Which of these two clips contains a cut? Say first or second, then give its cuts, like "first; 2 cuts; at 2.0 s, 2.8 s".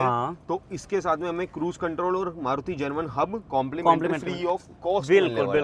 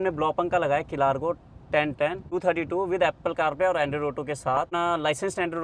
second; 2 cuts; at 2.2 s, 4.7 s